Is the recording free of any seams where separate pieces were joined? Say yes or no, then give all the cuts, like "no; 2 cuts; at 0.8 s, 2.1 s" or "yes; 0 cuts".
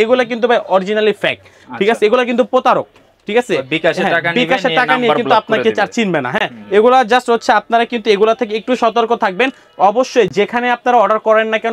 yes; 0 cuts